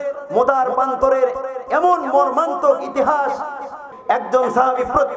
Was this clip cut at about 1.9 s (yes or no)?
no